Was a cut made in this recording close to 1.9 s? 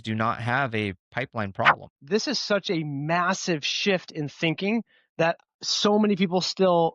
yes; 1 cut; at 1.9 s

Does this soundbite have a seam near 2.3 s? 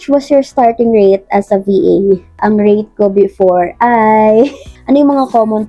no; 1 cut; at 4.7 s

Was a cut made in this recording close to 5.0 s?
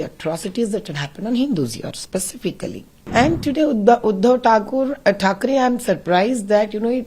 no; 1 cut; at 2.9 s

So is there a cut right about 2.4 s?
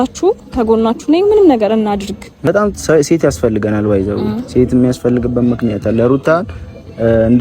yes; 1 cut; at 2.4 s

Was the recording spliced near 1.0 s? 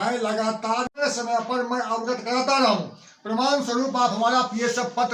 yes; 1 cut; at 1.0 s

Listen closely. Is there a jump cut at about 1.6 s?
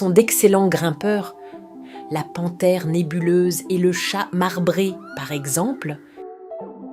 no; 1 cut; at 6.0 s

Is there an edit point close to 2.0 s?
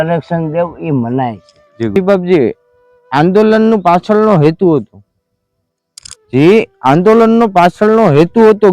yes; 1 cut; at 2.0 s

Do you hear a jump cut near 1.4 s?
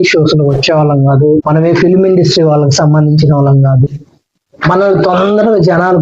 yes; 1 cut; at 1.4 s

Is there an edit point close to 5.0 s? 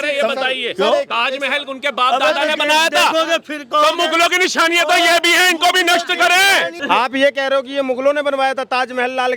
no; 1 cut; at 6.7 s

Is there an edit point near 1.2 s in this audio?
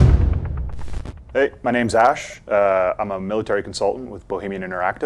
yes; 1 cut; at 1.2 s

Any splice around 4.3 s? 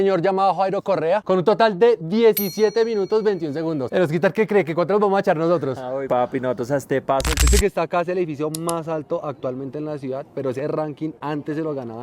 no; 1 cut; at 7.3 s

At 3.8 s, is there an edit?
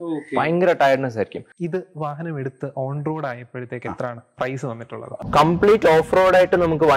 no; 2 cuts; at 1.4 s, 5.1 s

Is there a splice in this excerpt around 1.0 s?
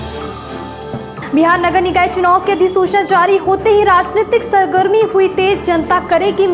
yes; 1 cut; at 1.0 s

